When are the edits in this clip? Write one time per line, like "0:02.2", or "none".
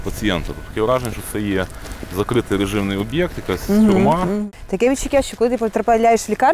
0:04.3